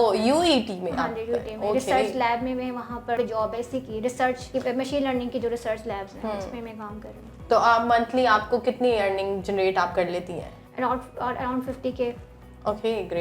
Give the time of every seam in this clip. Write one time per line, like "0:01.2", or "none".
0:03.2
0:04.4
0:10.6